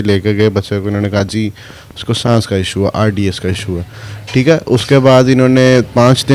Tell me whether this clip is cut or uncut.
uncut